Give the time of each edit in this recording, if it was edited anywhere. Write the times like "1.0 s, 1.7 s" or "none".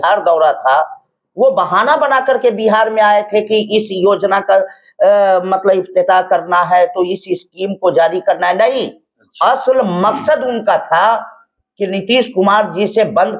none